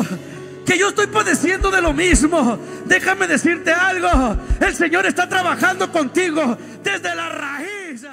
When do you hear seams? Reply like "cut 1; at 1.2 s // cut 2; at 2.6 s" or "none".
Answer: none